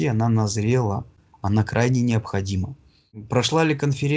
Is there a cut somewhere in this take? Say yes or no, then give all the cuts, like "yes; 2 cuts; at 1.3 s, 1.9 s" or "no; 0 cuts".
yes; 1 cut; at 3.2 s